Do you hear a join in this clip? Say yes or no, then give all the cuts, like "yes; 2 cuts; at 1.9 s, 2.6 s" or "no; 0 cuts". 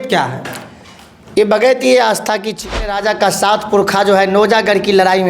yes; 1 cut; at 2.8 s